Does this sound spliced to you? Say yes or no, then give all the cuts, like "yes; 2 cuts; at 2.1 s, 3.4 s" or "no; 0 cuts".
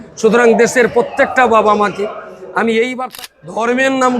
yes; 1 cut; at 3.1 s